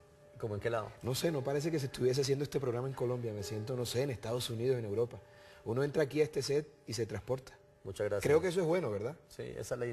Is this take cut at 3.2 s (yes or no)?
yes